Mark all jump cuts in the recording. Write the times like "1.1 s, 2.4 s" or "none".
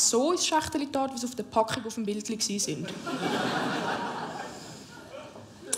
none